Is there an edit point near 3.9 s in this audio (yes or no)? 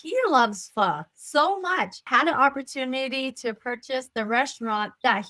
no